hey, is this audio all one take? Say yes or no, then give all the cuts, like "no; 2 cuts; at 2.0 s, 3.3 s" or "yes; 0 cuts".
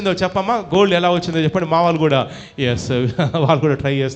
yes; 0 cuts